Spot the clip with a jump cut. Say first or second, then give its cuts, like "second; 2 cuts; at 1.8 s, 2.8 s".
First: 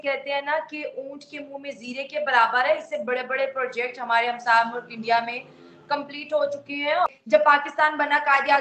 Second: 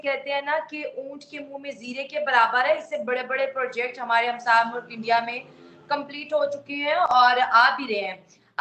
first; 1 cut; at 7.1 s